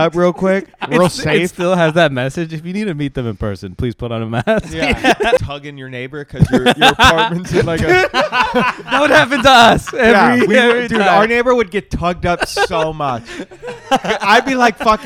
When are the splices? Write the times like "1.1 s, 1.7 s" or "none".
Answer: 5.4 s

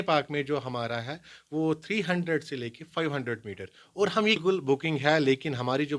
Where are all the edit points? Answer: 4.4 s

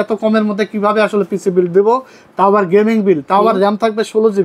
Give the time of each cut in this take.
none

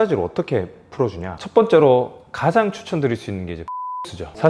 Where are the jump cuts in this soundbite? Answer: 1.2 s

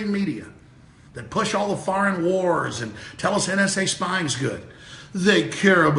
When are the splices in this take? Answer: 2.1 s

